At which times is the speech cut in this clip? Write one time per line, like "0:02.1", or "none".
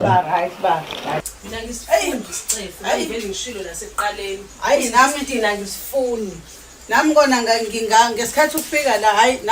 0:01.2

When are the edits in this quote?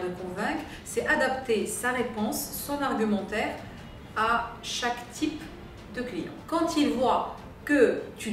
0:06.3

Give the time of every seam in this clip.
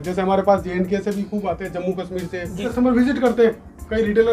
0:02.7

